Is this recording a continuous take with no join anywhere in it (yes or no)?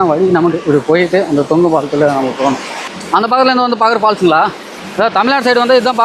yes